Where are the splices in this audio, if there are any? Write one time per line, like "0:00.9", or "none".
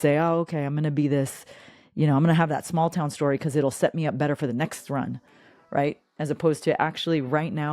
none